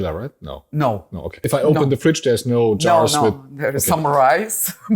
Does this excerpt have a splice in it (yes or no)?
yes